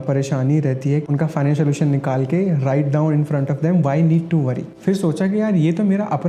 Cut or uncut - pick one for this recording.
cut